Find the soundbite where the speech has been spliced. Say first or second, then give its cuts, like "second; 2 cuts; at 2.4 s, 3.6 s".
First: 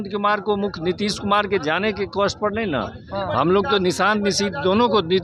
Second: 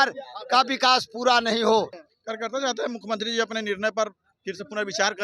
second; 1 cut; at 2.0 s